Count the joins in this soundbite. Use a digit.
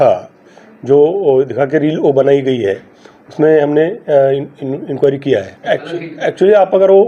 1